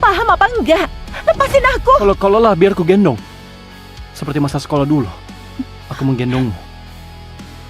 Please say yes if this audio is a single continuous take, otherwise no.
no